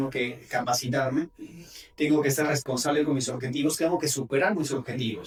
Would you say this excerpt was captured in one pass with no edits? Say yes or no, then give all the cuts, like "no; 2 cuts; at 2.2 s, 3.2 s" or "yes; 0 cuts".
yes; 0 cuts